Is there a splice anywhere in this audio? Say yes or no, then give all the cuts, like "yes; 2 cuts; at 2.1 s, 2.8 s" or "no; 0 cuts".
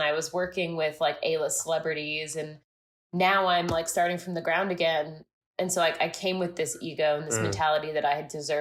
no; 0 cuts